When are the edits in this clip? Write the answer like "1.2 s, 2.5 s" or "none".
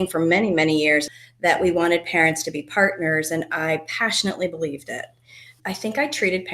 1.2 s, 5.5 s